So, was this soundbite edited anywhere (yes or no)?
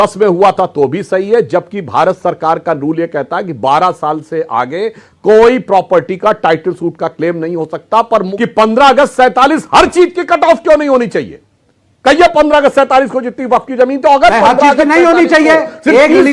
yes